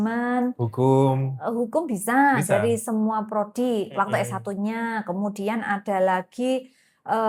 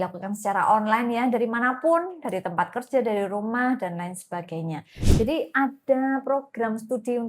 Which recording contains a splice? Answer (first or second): second